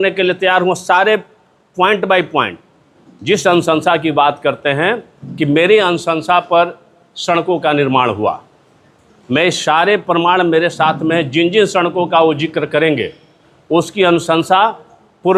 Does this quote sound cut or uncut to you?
uncut